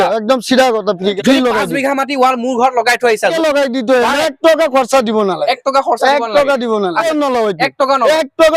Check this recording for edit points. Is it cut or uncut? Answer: cut